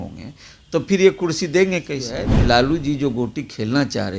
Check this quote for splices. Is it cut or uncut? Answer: cut